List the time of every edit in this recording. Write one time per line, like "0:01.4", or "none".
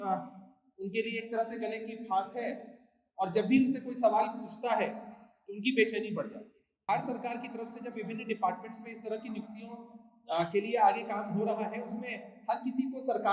0:06.9